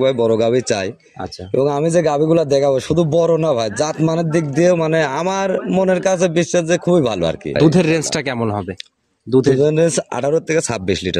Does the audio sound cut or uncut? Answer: cut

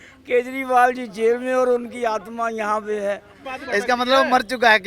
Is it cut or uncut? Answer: cut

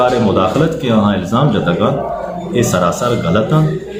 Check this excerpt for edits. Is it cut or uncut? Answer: uncut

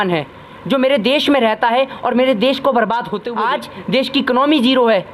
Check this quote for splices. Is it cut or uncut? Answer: cut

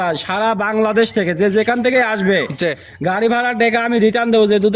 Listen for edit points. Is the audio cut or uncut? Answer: uncut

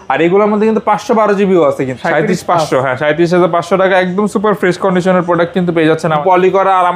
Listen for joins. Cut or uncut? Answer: cut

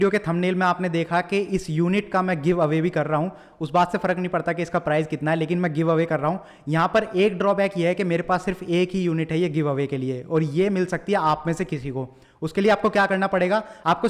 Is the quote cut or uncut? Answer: uncut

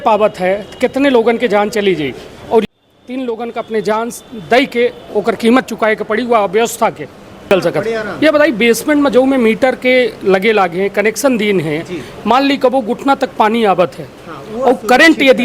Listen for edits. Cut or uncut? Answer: cut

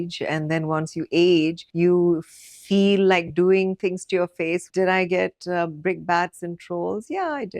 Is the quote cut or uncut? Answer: cut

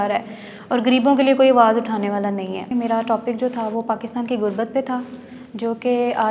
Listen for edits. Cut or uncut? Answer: cut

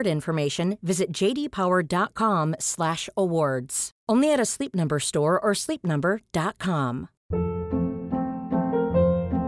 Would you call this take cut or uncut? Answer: cut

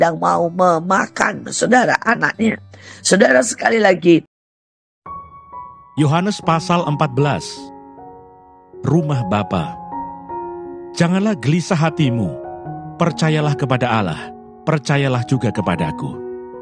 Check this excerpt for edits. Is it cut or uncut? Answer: cut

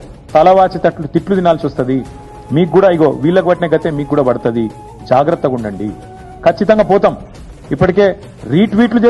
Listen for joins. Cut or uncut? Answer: uncut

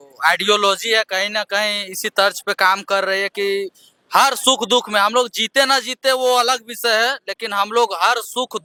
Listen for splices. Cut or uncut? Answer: uncut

